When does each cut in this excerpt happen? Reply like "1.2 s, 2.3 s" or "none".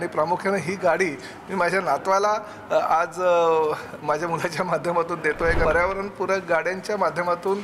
5.6 s